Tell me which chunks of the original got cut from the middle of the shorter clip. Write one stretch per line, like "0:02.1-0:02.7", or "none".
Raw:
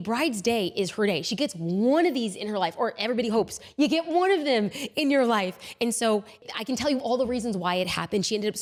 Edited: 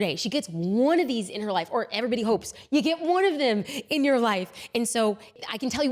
none

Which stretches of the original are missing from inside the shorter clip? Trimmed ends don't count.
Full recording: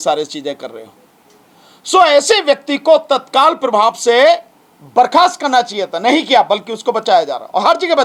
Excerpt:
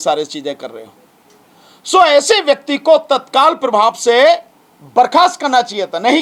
none

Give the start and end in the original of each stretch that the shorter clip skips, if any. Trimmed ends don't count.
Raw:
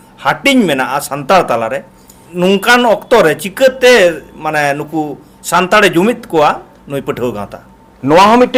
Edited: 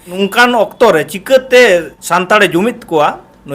0:04.3-0:05.4

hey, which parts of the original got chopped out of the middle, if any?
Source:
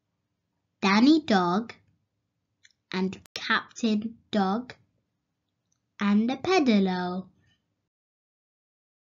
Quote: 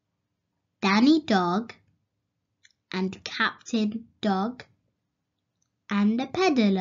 0:03.2-0:03.3

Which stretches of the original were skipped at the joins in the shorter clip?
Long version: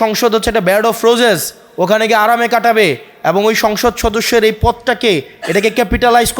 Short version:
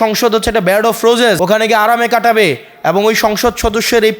0:01.4-0:01.8

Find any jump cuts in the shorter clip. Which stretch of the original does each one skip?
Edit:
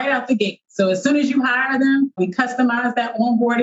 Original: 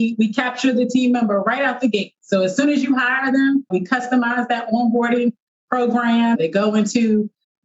none

